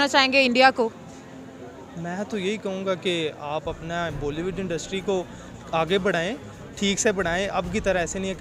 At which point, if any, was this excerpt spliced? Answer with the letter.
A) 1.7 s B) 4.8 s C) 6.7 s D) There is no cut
D